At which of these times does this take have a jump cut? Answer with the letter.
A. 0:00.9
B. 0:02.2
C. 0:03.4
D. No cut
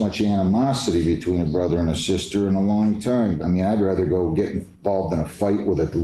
C